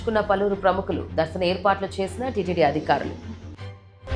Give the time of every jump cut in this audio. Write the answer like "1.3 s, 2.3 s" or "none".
none

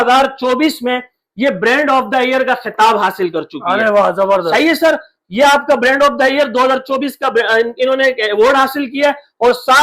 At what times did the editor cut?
none

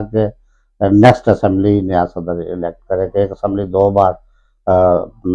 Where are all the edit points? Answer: none

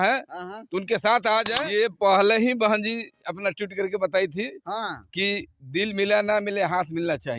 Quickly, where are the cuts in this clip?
1.6 s

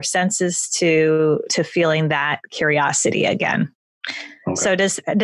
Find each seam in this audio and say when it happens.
none

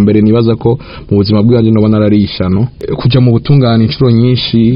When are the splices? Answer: 2.8 s

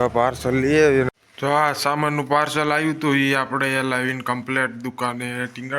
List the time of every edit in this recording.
1.1 s

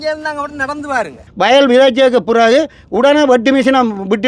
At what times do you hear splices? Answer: 1.2 s

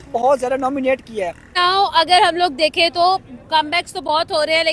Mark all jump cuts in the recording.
1.5 s

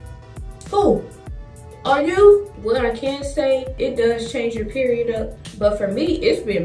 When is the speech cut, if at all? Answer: 2.5 s, 3.7 s, 5.4 s

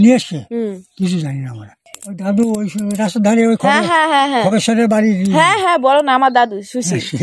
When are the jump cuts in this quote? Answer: 1.9 s

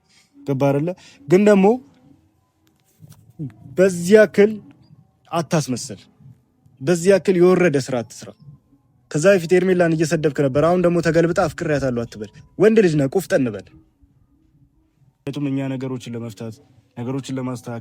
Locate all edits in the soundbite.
15.3 s

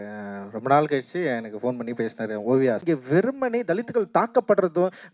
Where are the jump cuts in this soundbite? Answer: 2.8 s

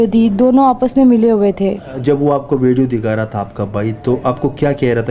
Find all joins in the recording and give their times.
2.0 s

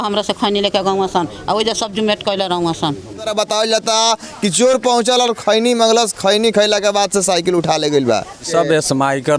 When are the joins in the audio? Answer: 3.3 s, 8.4 s

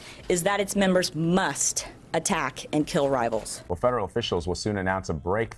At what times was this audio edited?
3.6 s

